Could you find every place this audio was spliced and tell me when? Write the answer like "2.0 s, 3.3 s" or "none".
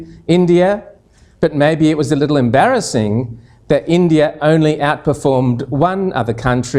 none